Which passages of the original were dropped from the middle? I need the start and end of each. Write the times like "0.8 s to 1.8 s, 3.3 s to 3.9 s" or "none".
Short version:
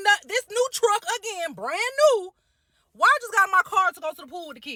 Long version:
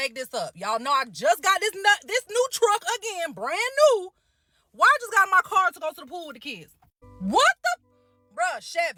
none